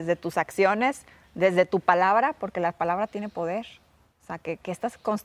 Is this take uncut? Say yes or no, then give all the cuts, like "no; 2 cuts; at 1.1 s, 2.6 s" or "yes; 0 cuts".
yes; 0 cuts